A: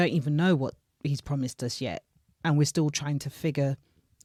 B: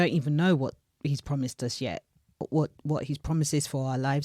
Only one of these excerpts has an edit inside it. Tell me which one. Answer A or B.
B